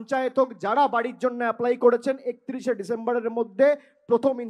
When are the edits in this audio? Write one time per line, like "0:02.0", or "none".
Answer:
none